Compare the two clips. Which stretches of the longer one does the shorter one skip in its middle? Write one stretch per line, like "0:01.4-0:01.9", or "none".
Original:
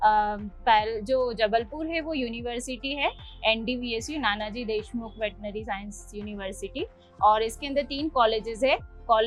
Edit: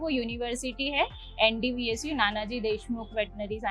none

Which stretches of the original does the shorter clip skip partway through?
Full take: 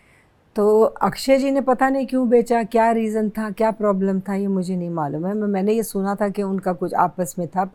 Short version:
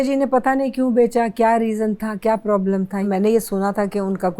0:04.4-0:05.5

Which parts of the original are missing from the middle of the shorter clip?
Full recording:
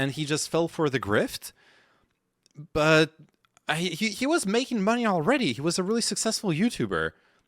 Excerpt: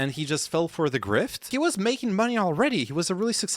0:01.5-0:04.1

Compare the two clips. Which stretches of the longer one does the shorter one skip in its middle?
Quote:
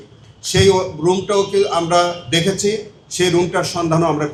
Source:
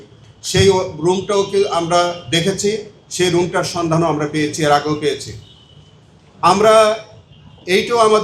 none

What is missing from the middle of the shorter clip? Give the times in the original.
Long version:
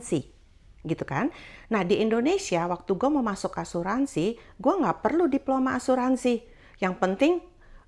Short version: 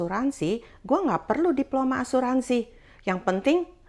none

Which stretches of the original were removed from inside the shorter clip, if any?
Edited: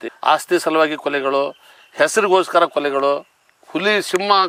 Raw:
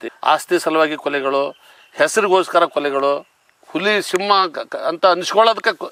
none

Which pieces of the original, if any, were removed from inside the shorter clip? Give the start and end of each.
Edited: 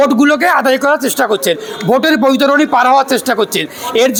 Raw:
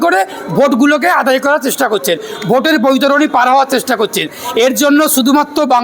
none

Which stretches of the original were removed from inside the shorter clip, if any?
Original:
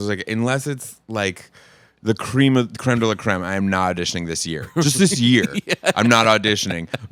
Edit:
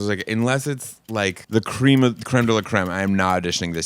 0:01.4-0:01.9

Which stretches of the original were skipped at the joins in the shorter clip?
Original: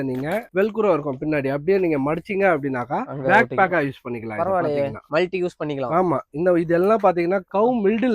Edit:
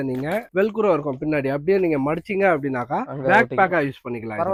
none

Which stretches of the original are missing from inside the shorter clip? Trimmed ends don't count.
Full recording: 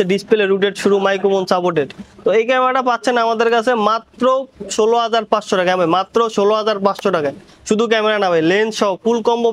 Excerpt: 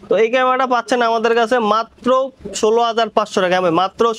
none

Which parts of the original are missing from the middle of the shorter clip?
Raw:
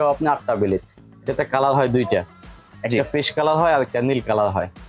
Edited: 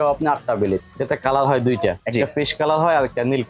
0:00.9-0:01.2
0:02.3-0:02.8

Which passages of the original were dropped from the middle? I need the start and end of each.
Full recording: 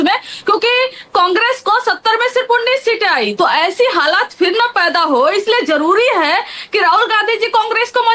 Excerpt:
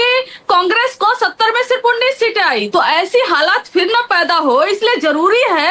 none

